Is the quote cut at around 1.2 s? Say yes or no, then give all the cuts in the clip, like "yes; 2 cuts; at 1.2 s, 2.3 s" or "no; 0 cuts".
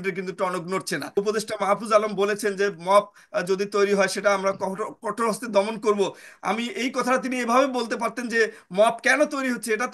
yes; 1 cut; at 1.2 s